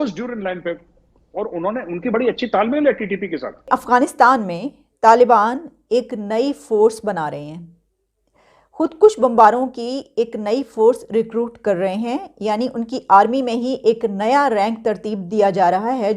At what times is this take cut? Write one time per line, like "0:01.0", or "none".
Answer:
0:03.7